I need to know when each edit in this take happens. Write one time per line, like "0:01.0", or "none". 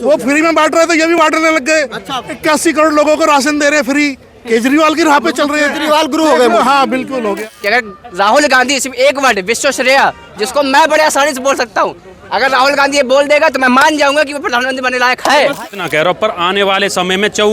0:07.5
0:15.6